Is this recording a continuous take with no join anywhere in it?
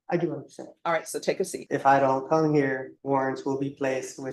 no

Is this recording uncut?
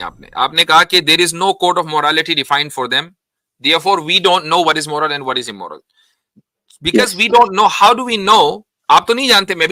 yes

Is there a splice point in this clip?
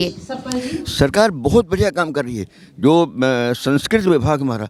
no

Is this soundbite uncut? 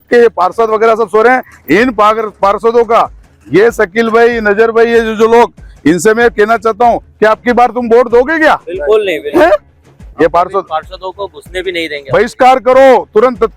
no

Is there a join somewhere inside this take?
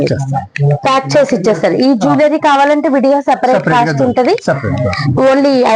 no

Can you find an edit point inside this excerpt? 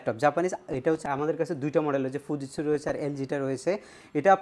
yes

